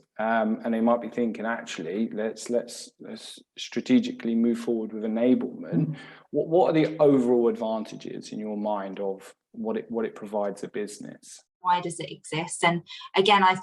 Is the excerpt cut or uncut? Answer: cut